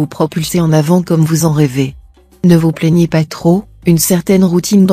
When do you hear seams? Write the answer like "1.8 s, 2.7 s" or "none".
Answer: 3.9 s